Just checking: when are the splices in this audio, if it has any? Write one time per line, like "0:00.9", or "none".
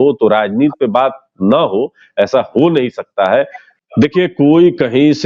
0:03.7